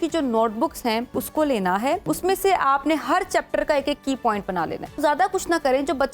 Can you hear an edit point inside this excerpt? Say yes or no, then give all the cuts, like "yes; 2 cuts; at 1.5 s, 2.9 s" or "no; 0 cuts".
yes; 3 cuts; at 1.1 s, 2.0 s, 5.0 s